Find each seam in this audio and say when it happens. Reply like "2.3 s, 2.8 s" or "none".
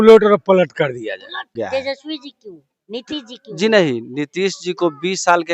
1.5 s